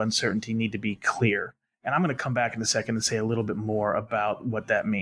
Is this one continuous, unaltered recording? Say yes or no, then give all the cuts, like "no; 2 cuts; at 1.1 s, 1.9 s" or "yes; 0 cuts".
yes; 0 cuts